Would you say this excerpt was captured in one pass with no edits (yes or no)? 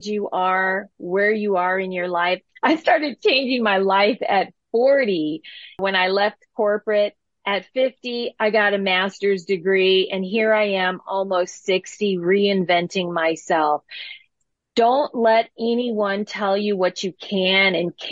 no